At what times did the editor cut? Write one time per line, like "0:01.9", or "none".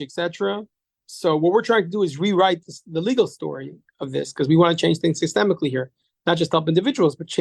none